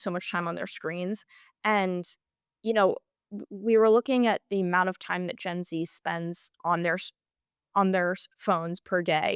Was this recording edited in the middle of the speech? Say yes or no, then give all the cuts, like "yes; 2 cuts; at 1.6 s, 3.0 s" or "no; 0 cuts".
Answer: no; 0 cuts